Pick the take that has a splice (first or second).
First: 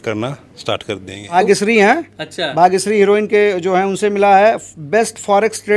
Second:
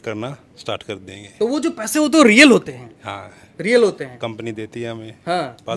first